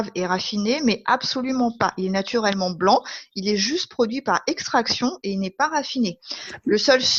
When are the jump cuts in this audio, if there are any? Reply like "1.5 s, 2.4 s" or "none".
none